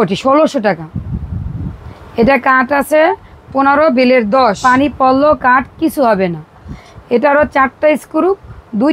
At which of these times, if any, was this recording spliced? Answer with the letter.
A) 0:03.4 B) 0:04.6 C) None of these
B